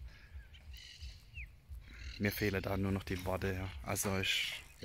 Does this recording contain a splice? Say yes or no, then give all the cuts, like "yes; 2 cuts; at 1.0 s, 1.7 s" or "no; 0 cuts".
no; 0 cuts